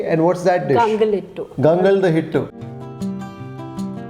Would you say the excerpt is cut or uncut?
cut